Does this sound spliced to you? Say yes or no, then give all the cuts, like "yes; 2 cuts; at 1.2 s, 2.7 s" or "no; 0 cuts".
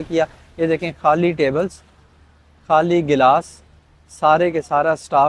no; 0 cuts